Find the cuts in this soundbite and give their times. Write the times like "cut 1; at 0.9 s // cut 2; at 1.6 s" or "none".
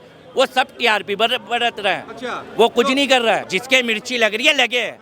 cut 1; at 3.5 s